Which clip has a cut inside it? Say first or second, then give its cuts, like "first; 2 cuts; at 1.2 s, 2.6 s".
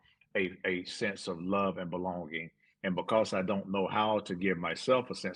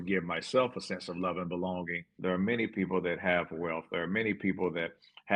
second; 1 cut; at 2.0 s